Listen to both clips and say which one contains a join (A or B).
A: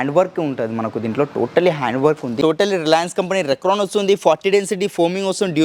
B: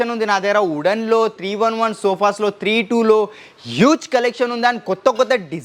A